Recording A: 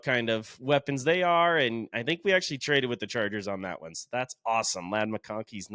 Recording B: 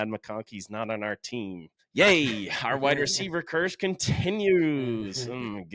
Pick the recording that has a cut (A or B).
B